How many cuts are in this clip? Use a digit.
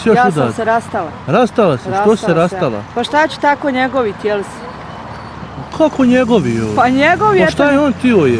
0